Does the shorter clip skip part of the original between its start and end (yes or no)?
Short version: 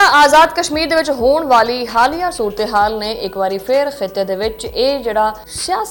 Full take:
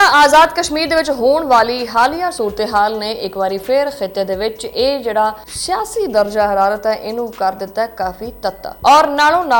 no